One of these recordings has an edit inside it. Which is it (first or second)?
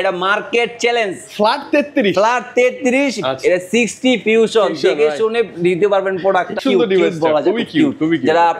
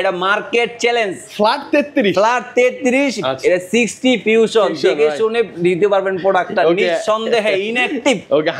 first